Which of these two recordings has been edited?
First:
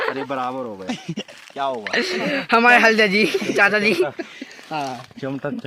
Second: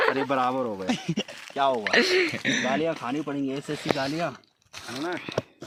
first; 1 cut; at 2.2 s

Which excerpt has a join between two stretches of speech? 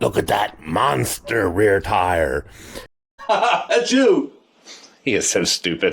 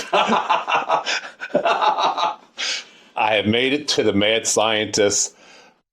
first; 1 cut; at 2.9 s

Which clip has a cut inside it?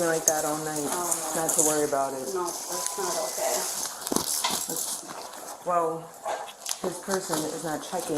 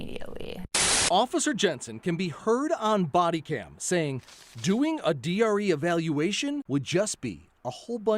second; 2 cuts; at 1.0 s, 6.6 s

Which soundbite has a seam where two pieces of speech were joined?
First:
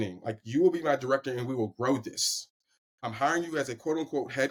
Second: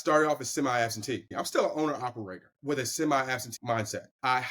second; 3 cuts; at 1.3 s, 2.5 s, 3.6 s

